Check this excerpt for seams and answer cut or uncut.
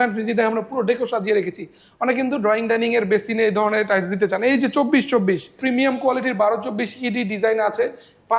cut